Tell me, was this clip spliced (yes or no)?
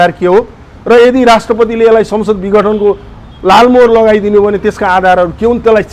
no